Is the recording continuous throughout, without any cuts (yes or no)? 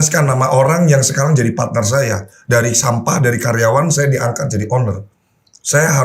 yes